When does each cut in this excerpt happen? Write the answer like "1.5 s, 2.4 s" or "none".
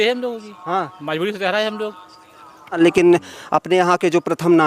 2.8 s